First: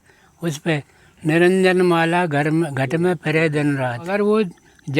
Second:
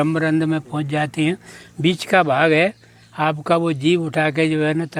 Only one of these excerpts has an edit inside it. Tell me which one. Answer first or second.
first